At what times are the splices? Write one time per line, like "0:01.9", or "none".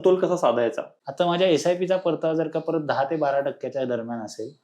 0:00.9